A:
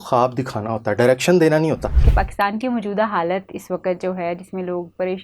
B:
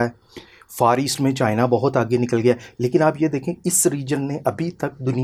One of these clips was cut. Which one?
A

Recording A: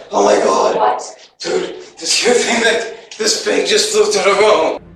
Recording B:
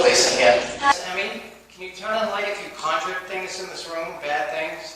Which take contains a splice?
B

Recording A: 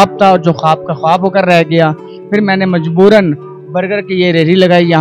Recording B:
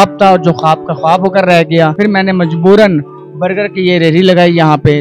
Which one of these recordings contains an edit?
B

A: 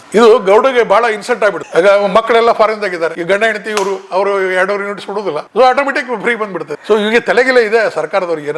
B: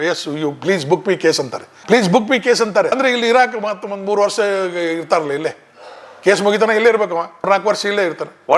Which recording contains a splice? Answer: A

